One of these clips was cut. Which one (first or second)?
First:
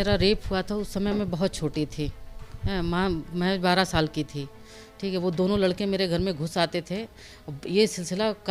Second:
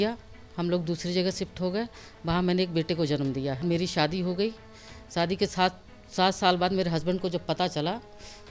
second